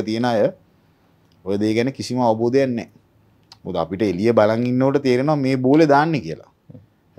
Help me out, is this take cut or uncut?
uncut